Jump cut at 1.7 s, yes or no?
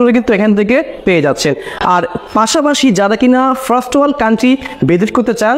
no